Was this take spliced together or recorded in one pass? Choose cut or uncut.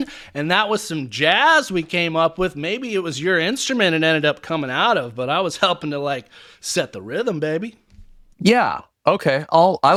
uncut